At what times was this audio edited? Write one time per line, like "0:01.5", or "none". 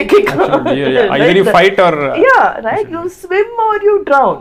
none